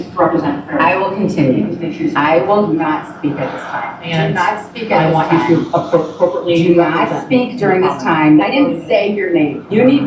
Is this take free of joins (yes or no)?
yes